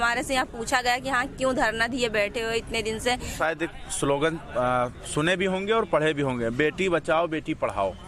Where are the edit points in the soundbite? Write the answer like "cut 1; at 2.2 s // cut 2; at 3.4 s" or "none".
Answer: cut 1; at 3.3 s

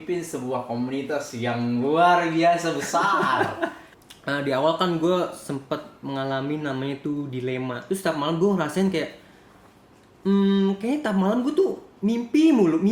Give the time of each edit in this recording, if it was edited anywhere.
cut 1; at 3.8 s // cut 2; at 7.8 s

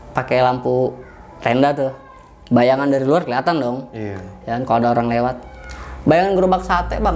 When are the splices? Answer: none

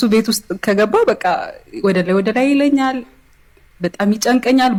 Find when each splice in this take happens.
none

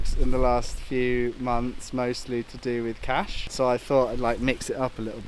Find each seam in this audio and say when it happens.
cut 1; at 3.4 s

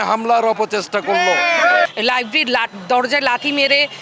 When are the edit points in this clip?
cut 1; at 1.9 s

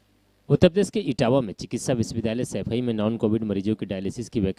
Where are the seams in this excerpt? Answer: none

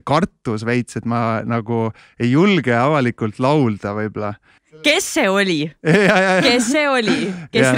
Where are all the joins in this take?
cut 1; at 4.8 s

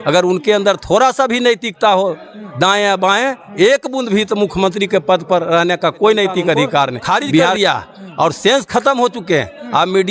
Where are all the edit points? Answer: cut 1; at 7.5 s

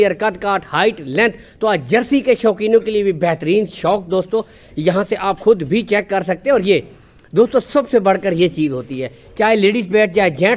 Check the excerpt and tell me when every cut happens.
none

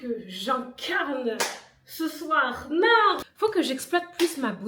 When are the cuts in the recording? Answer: cut 1; at 3.3 s

